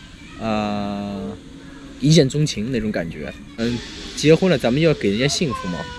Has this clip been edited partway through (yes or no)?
yes